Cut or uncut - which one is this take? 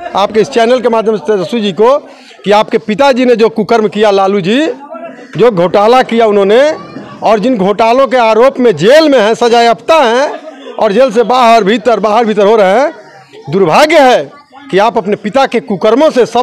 uncut